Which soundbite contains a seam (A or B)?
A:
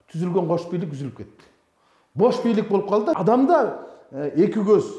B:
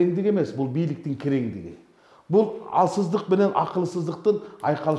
A